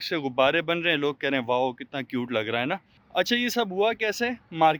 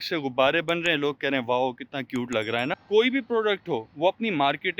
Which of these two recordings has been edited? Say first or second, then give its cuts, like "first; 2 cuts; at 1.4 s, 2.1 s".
second; 1 cut; at 2.8 s